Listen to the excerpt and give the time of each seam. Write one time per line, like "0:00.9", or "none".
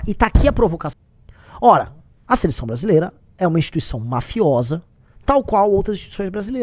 0:00.9